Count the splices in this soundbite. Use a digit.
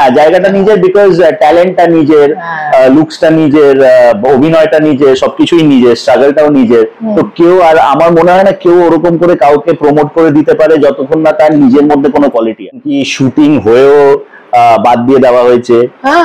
1